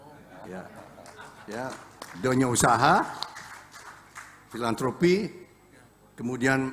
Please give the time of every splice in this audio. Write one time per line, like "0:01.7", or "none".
none